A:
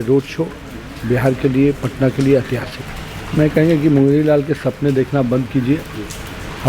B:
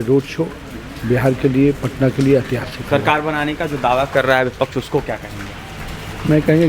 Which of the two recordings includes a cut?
A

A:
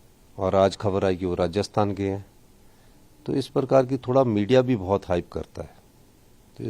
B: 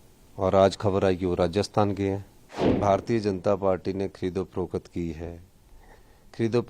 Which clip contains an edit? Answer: B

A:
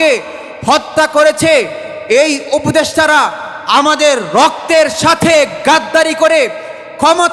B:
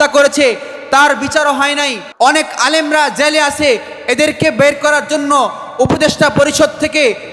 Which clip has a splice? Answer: B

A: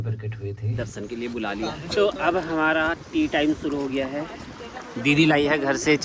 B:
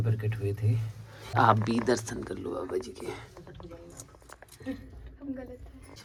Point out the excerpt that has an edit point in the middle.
A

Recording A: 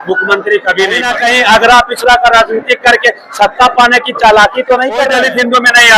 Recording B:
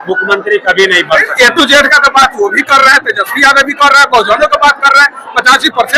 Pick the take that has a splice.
A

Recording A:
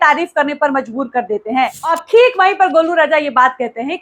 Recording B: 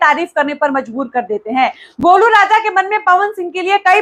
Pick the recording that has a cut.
A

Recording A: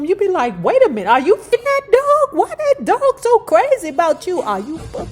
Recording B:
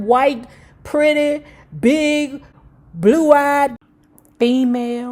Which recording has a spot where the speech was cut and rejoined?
A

